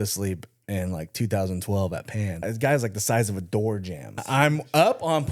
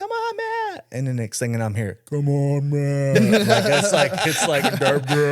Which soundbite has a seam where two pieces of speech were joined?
first; 2 cuts; at 2.4 s, 4.2 s

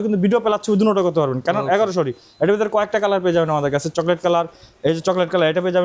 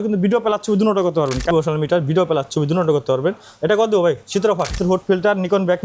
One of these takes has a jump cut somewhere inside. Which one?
second; 2 cuts; at 1.5 s, 4.8 s

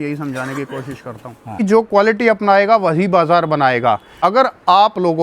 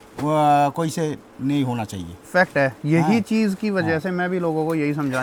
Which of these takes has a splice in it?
first; 2 cuts; at 1.6 s, 4.1 s

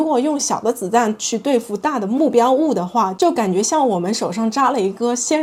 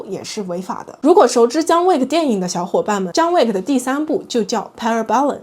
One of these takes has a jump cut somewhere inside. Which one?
second; 1 cut; at 0.9 s

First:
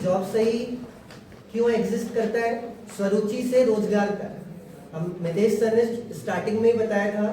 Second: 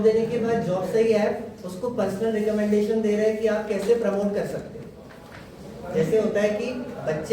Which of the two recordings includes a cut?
first; 1 cut; at 3.8 s

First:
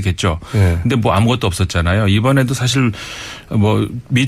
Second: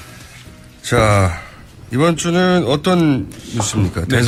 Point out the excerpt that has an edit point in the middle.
first; 1 cut; at 2.6 s

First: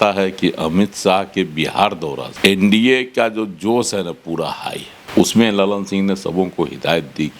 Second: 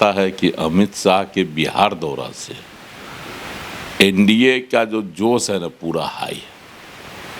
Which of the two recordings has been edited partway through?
first; 2 cuts; at 2.3 s, 4.9 s

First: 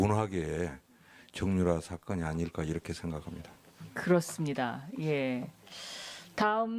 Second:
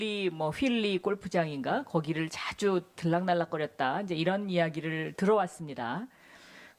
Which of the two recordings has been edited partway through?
second; 1 cut; at 5.7 s

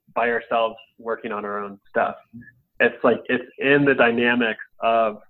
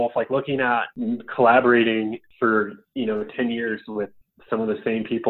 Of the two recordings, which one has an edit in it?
second; 2 cuts; at 0.9 s, 2.3 s

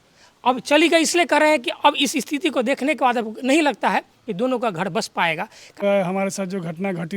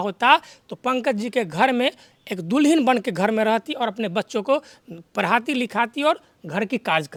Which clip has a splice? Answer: first; 1 cut; at 5.8 s

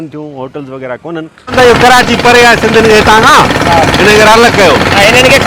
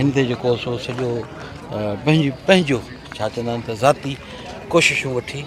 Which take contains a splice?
first; 1 cut; at 1.5 s

